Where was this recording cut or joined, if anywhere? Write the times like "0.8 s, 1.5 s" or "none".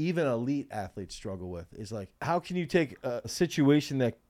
2.1 s, 3.3 s